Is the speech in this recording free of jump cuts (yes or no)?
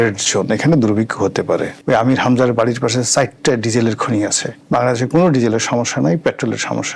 no